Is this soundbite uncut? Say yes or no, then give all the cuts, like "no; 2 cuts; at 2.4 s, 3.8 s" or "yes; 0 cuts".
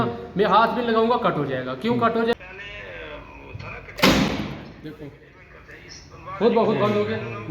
no; 2 cuts; at 2.3 s, 3.9 s